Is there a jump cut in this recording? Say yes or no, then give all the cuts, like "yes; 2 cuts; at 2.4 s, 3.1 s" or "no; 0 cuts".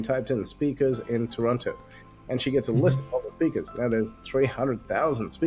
no; 0 cuts